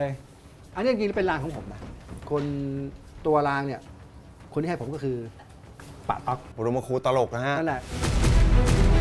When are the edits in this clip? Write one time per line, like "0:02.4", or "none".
0:06.5